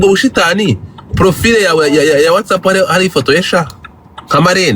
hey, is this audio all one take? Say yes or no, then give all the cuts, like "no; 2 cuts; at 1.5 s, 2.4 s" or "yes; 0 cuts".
yes; 0 cuts